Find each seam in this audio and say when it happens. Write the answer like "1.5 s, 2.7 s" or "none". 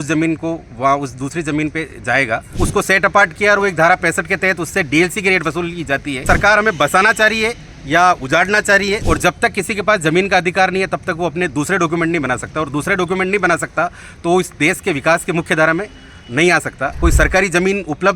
2.5 s, 6.2 s, 9.0 s, 17.0 s